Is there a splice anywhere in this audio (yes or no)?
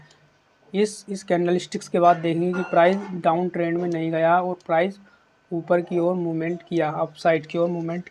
no